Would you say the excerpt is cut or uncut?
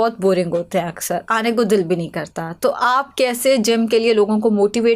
uncut